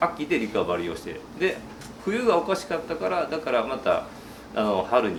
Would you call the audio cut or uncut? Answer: uncut